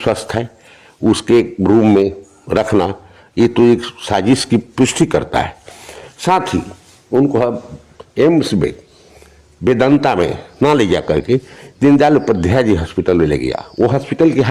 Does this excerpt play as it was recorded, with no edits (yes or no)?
yes